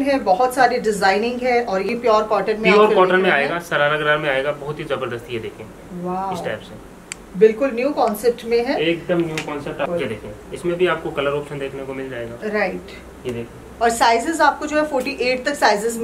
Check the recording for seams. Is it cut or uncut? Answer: cut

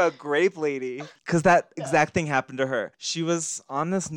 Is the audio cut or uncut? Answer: cut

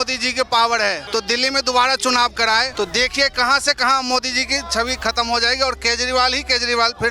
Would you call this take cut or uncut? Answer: cut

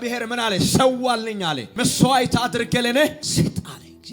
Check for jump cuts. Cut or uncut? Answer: cut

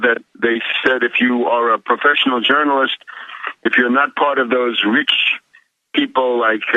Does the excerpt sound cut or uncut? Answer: cut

